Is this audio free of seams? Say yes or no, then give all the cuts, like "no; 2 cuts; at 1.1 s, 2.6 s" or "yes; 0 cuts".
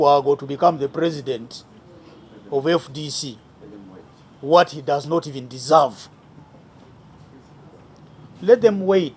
yes; 0 cuts